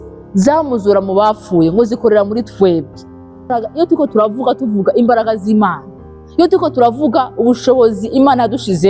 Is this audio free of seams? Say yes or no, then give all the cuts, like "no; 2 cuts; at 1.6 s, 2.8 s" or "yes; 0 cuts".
no; 1 cut; at 3.5 s